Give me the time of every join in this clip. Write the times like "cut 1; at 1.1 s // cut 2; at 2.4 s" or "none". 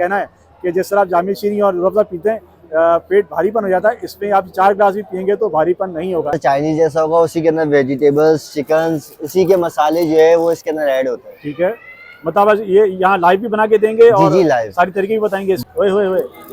cut 1; at 6.4 s // cut 2; at 15.6 s